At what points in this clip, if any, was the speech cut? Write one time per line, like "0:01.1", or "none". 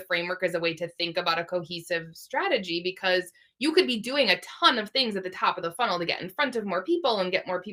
none